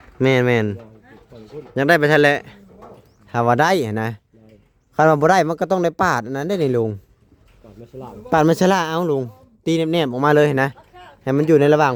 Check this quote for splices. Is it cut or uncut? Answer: uncut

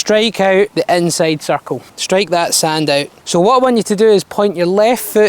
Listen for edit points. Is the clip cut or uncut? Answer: cut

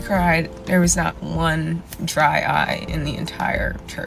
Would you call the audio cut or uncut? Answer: uncut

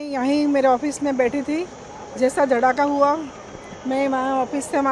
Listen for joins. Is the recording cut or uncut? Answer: uncut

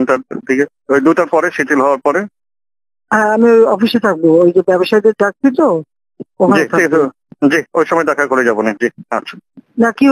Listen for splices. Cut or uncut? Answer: uncut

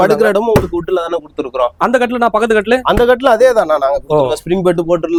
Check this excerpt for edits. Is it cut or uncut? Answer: uncut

